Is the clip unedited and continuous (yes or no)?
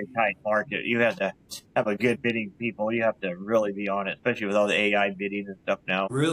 yes